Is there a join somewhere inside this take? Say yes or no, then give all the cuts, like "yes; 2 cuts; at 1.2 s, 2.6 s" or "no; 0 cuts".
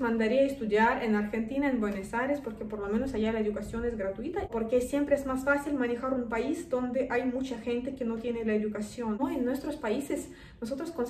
yes; 2 cuts; at 4.5 s, 9.2 s